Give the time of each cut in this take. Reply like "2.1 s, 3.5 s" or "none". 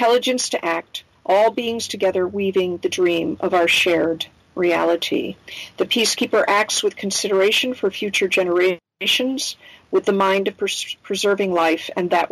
none